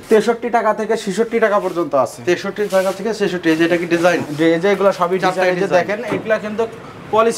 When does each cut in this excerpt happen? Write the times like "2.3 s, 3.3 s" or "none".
none